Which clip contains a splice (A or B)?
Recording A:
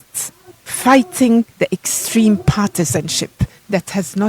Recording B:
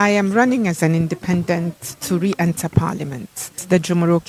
A